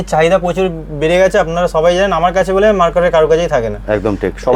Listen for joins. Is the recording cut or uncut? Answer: uncut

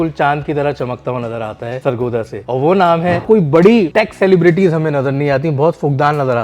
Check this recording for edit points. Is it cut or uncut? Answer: cut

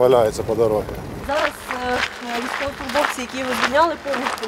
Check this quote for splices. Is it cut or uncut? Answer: cut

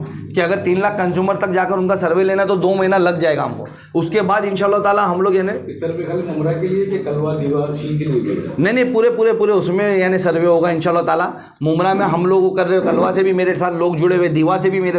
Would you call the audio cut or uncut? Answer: uncut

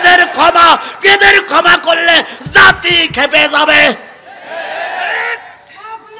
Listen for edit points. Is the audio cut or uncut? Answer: uncut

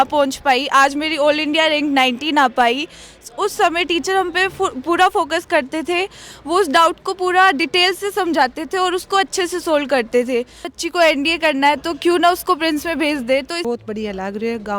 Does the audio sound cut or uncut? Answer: cut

